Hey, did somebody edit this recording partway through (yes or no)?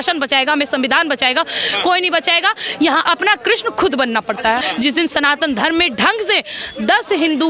yes